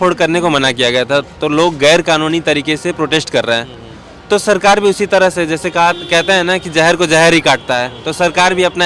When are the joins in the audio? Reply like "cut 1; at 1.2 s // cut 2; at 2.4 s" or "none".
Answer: none